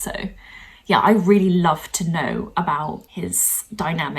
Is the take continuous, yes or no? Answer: no